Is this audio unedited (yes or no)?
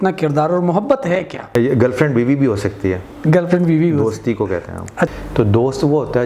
no